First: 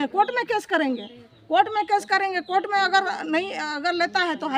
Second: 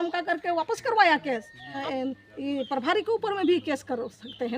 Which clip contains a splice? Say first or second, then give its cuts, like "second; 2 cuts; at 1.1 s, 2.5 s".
second; 1 cut; at 1.8 s